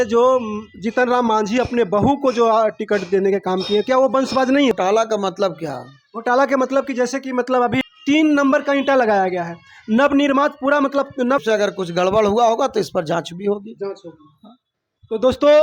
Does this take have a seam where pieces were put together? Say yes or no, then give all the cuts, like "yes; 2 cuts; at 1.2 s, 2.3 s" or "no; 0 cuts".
yes; 3 cuts; at 4.7 s, 7.8 s, 11.4 s